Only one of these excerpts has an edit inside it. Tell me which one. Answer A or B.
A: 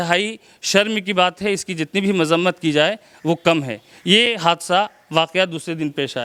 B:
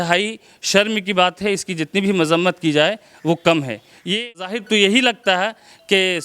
B